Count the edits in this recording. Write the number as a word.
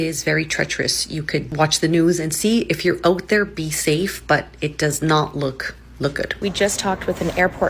two